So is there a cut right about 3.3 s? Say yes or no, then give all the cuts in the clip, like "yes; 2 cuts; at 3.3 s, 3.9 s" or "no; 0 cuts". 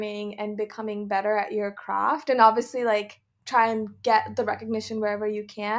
yes; 1 cut; at 3.3 s